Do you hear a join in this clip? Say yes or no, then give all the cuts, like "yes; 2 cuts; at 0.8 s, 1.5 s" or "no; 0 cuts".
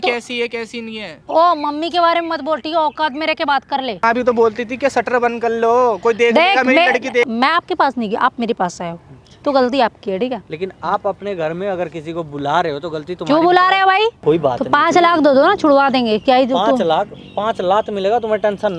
yes; 3 cuts; at 4.0 s, 7.2 s, 14.2 s